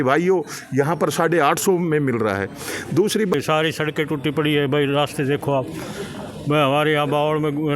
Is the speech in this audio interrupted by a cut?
yes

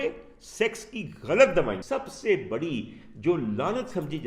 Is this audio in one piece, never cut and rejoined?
no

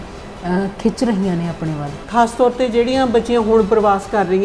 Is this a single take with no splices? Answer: no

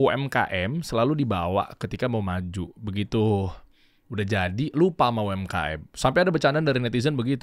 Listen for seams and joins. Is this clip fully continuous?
yes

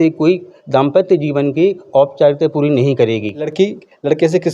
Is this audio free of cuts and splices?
no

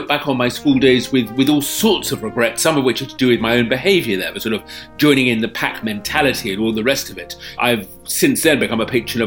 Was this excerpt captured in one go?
no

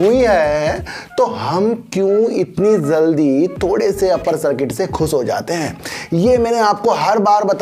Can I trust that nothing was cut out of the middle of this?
yes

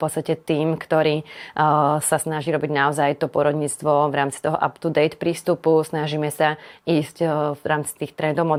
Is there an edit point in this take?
no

